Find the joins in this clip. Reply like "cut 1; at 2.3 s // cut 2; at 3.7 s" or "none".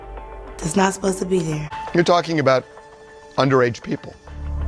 cut 1; at 1.7 s